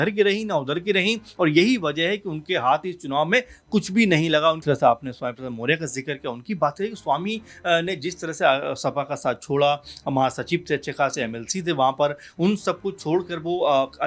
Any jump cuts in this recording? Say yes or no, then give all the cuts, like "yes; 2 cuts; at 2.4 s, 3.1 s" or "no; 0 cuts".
yes; 1 cut; at 4.6 s